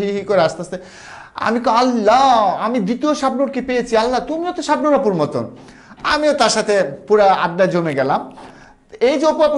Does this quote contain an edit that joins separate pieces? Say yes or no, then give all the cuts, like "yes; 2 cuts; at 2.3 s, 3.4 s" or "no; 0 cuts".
no; 0 cuts